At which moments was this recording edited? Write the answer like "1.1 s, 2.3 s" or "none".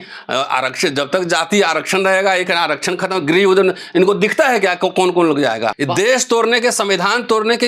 5.8 s